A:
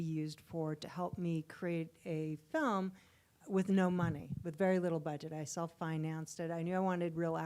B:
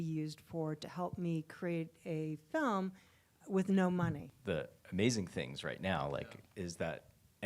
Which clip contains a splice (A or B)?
B